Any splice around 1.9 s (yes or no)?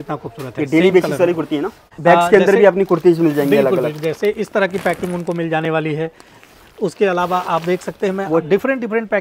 yes